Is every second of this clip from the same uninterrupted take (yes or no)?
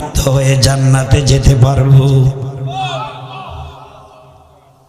yes